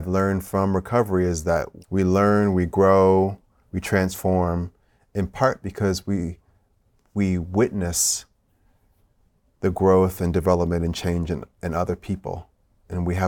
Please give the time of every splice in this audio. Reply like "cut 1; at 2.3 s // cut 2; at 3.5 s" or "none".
cut 1; at 1.8 s